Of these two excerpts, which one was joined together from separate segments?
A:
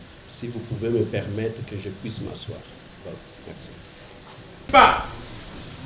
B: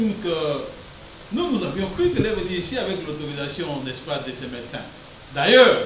A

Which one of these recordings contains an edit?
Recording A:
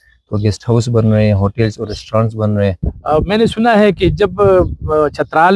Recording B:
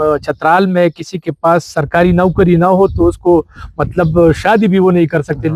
A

